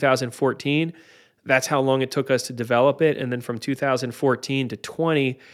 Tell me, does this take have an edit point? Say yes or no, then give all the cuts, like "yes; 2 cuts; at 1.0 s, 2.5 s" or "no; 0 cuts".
no; 0 cuts